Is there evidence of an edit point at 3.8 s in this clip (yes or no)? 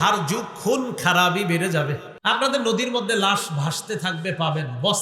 no